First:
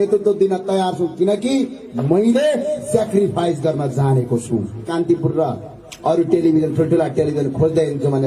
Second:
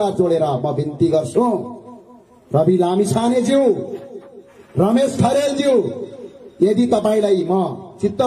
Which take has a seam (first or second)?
first